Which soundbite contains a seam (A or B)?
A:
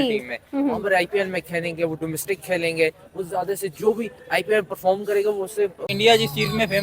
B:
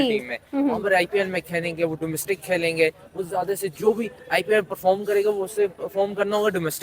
A